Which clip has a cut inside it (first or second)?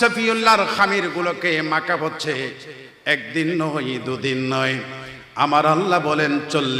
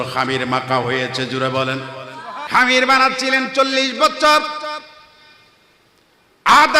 second